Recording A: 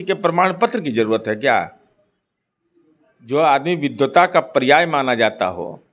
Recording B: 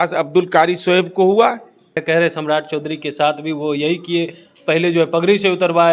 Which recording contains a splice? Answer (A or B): B